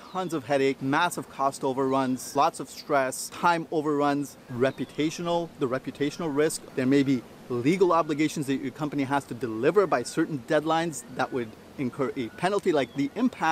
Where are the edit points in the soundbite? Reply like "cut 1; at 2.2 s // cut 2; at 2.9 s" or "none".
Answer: cut 1; at 0.8 s // cut 2; at 2.2 s // cut 3; at 3.3 s // cut 4; at 4.4 s // cut 5; at 6.6 s